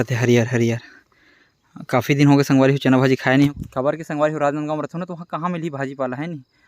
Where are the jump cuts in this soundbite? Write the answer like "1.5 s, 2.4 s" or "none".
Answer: 3.5 s